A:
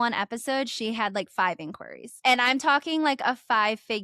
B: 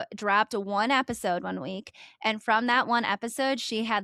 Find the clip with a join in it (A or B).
A